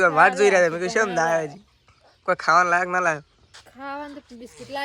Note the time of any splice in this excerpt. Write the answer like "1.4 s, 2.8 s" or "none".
none